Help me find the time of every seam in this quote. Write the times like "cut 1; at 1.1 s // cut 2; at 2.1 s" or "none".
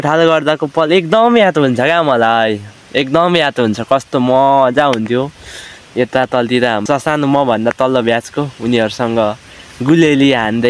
cut 1; at 6.8 s